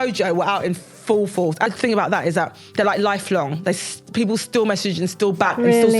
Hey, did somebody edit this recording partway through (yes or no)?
yes